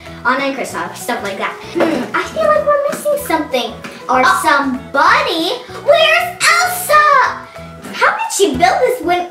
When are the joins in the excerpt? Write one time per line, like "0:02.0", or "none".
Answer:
none